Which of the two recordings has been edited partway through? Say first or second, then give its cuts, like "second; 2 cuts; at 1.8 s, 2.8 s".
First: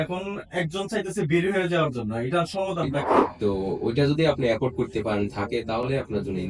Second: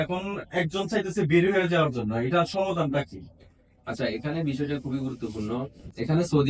first; 1 cut; at 3.2 s